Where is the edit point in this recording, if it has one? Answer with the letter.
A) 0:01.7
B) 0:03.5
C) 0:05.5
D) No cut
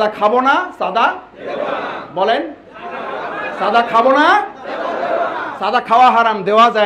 D